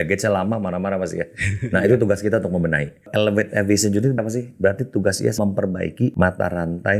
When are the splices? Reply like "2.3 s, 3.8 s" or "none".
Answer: 3.1 s, 4.2 s, 5.5 s